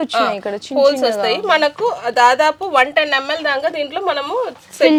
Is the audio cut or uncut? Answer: uncut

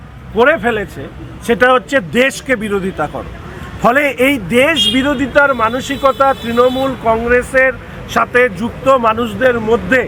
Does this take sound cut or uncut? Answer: uncut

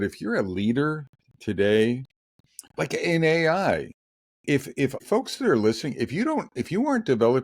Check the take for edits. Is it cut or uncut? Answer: cut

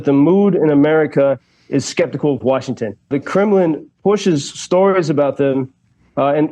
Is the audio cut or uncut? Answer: cut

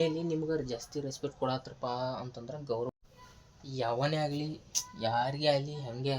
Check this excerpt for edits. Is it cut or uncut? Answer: cut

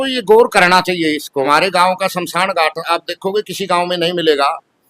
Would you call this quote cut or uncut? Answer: cut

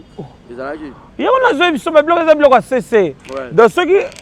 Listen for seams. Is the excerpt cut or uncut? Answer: uncut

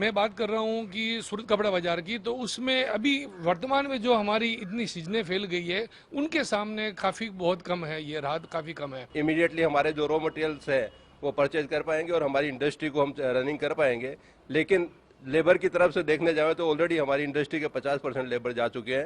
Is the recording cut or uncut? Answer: cut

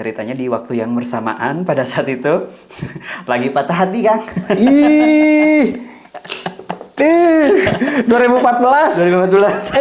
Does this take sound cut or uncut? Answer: uncut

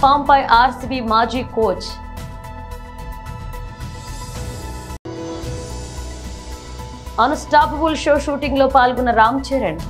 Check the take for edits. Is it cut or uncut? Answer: cut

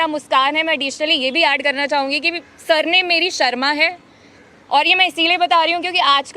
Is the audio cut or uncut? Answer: uncut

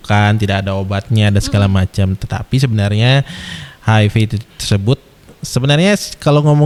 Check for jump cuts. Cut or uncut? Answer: uncut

